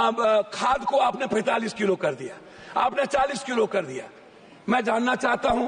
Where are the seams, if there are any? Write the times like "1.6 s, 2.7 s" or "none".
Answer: none